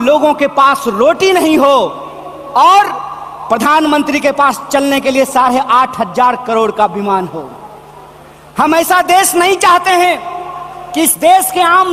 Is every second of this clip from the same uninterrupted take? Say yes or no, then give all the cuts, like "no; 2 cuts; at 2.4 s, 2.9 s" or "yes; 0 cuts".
yes; 0 cuts